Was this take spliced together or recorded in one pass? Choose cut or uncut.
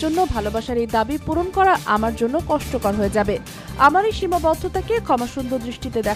uncut